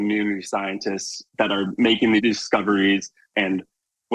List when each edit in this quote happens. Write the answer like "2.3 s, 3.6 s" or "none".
1.3 s, 2.2 s, 3.3 s